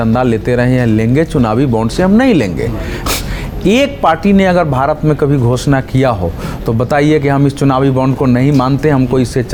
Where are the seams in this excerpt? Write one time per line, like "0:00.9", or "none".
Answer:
none